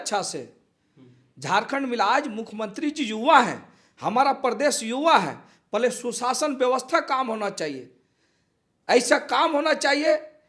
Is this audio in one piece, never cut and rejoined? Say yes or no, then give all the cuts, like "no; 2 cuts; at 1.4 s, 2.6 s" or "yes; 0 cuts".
yes; 0 cuts